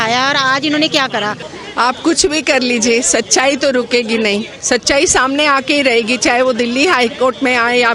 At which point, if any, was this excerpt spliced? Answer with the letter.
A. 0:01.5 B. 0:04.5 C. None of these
A